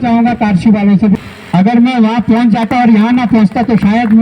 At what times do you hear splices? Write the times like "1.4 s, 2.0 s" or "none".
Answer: 1.2 s

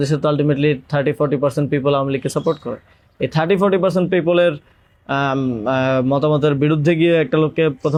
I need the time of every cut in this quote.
none

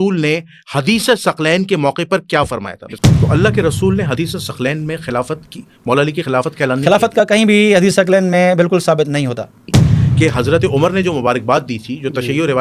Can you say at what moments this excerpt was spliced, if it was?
3.0 s, 9.7 s

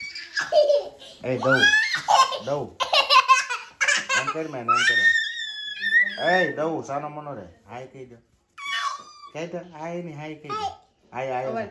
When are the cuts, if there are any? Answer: none

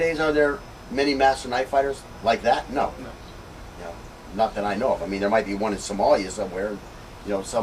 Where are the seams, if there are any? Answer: none

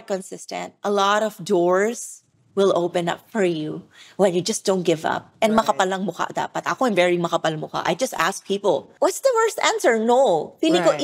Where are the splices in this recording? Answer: 8.9 s

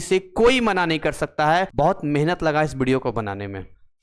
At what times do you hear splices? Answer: 1.7 s

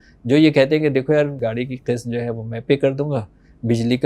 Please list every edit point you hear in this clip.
1.4 s

